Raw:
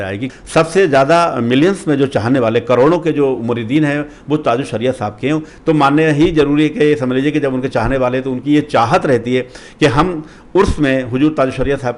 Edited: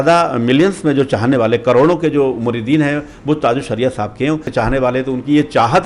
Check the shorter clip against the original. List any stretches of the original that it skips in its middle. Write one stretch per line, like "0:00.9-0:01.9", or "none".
0:05.5-0:07.7